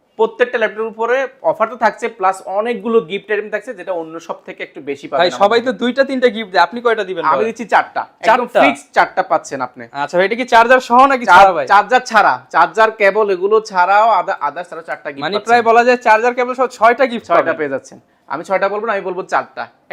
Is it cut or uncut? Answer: uncut